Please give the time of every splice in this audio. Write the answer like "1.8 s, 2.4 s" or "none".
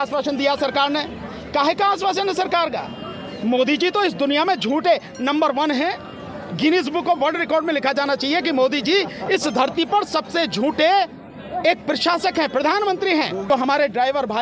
13.5 s